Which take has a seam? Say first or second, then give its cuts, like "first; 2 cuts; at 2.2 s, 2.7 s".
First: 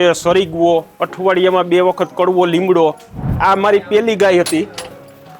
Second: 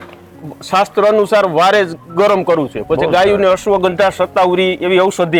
first; 1 cut; at 3.4 s